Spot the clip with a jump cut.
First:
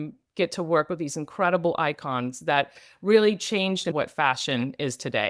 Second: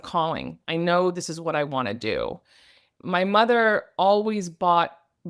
second; 1 cut; at 2.9 s

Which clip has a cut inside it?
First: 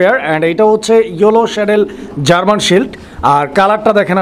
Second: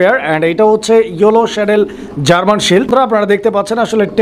second; 1 cut; at 2.9 s

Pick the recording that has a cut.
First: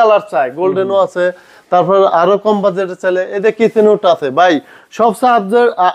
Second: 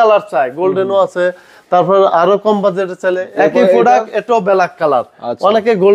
second; 1 cut; at 3.2 s

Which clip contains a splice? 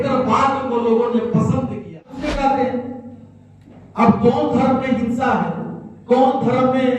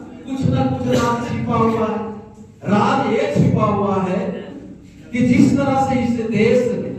first; 1 cut; at 2.2 s

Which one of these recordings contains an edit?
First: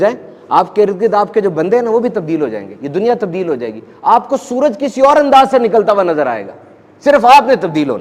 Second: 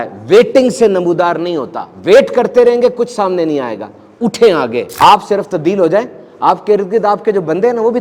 second; 1 cut; at 4.9 s

